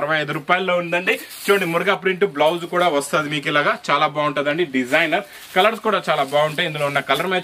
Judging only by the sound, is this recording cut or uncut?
uncut